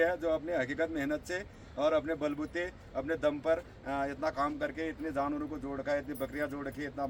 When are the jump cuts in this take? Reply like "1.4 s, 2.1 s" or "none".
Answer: none